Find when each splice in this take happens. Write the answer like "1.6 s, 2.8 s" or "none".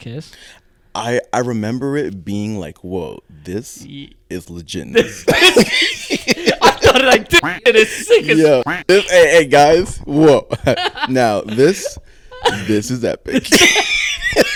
none